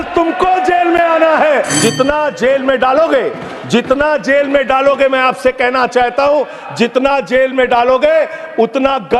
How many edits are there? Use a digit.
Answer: 1